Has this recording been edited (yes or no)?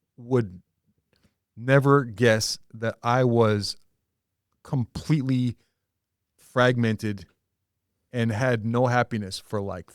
no